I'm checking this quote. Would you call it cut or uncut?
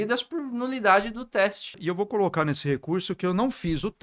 cut